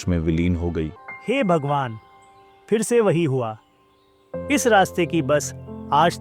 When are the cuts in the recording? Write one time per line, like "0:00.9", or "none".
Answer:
0:01.0